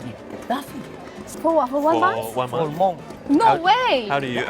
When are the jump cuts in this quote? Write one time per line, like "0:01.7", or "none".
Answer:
0:01.2
0:03.1